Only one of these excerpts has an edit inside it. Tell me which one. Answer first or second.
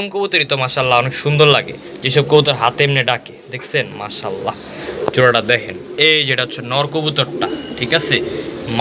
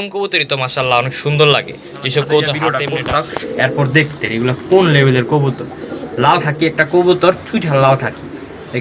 second